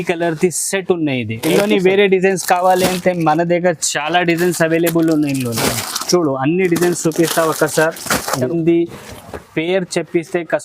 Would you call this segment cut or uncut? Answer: cut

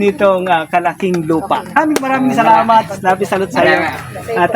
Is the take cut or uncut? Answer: cut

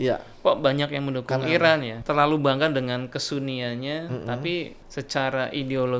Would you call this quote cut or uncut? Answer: cut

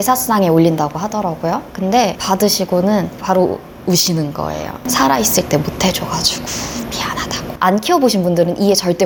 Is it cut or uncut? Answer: uncut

